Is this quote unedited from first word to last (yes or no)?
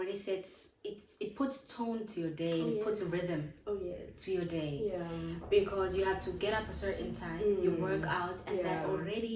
yes